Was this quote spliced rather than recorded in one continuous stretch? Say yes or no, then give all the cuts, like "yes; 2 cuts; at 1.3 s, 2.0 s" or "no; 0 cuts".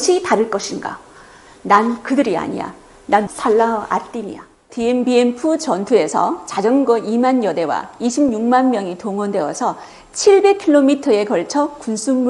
yes; 1 cut; at 4.7 s